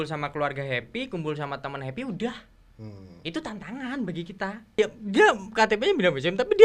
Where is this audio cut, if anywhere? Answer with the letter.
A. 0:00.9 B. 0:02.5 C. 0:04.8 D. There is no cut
C